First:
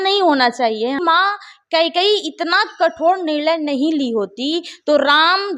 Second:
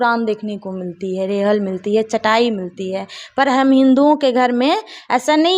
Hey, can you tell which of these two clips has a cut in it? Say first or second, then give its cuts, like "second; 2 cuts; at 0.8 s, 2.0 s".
first; 1 cut; at 1.0 s